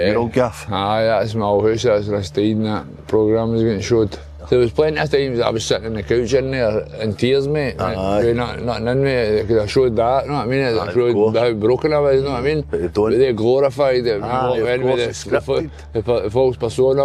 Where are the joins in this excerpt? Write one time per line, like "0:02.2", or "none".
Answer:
0:04.3

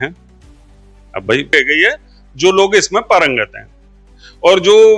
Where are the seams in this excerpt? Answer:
0:01.5

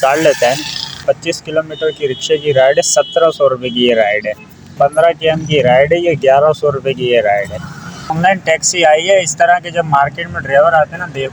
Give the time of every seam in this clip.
0:01.0
0:04.7
0:08.1

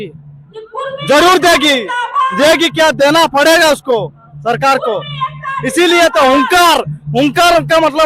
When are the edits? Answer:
none

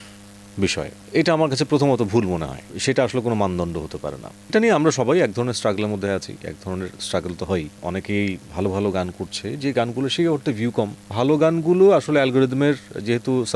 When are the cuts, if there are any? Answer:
0:01.0
0:02.7
0:07.8
0:11.1

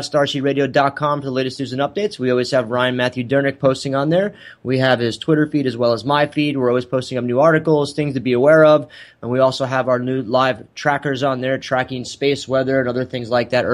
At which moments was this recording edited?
0:06.3

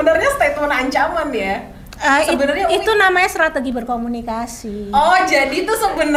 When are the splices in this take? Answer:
none

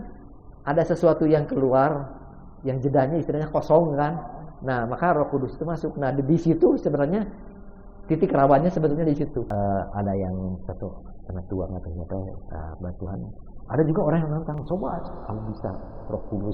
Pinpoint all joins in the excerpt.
0:09.6

